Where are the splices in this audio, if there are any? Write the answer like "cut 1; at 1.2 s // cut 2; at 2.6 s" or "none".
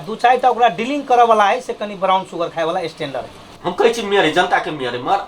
cut 1; at 3.5 s